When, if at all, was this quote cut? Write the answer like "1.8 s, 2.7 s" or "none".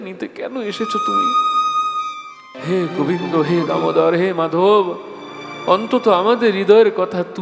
2.6 s